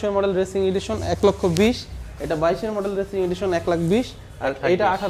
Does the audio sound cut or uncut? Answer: uncut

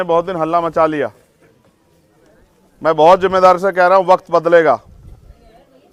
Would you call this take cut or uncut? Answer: uncut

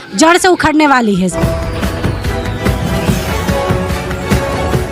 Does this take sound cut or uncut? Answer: cut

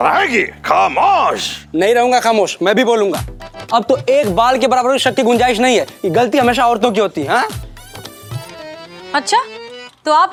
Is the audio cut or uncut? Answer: uncut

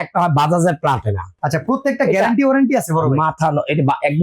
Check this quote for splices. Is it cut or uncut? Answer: cut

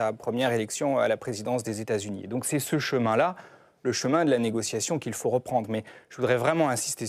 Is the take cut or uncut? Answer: uncut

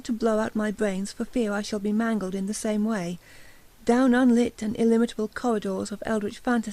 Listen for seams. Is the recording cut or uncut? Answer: cut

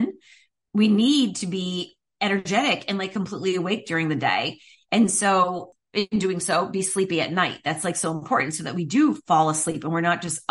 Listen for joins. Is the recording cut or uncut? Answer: cut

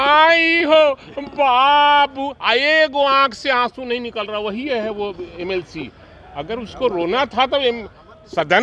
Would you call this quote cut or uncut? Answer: uncut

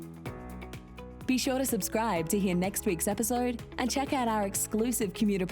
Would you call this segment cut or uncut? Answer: cut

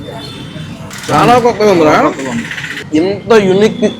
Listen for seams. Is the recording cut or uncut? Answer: cut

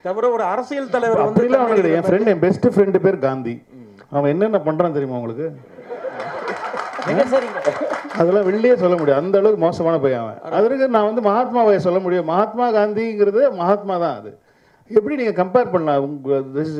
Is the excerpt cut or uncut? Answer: uncut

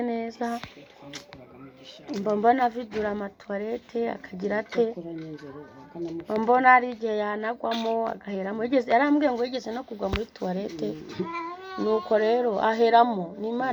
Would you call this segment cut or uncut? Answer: uncut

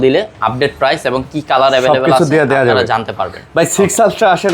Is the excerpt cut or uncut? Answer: uncut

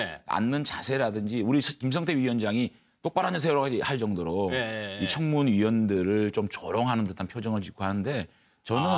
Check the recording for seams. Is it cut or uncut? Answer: cut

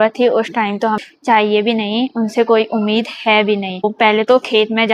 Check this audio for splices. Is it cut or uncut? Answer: cut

